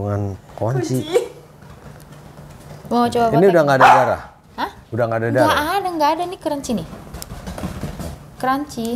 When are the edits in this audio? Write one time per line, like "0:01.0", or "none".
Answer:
none